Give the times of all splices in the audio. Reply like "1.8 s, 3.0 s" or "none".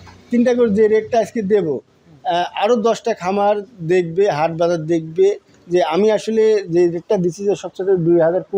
none